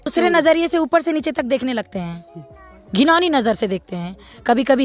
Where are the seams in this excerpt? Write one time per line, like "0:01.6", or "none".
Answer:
none